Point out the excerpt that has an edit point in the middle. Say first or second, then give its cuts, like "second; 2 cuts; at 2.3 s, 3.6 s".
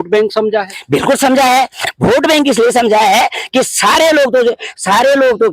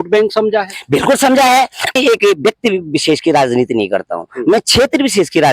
second; 1 cut; at 2.0 s